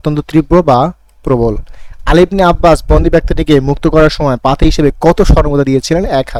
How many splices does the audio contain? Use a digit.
0